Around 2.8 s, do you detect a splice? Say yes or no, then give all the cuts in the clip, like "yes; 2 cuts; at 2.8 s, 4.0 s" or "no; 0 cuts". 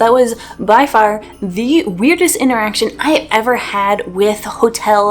no; 0 cuts